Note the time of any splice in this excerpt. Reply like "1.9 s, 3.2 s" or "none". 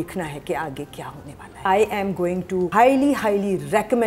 1.7 s, 2.7 s